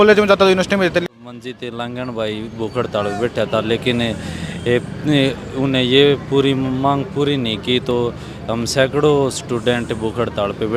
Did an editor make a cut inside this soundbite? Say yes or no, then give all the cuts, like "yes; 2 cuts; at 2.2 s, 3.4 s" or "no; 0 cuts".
yes; 1 cut; at 1.0 s